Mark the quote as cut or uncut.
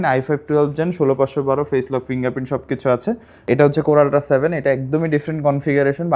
cut